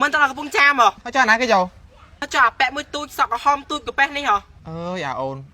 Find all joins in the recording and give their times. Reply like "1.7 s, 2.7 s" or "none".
1.0 s, 4.6 s